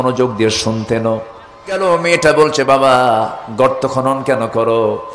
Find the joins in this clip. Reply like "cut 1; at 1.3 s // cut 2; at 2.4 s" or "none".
cut 1; at 1.8 s